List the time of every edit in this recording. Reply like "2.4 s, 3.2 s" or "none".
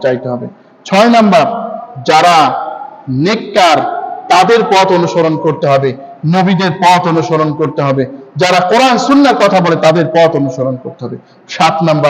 none